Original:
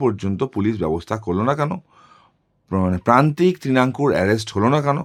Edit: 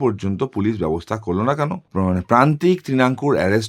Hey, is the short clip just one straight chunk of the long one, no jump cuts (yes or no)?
no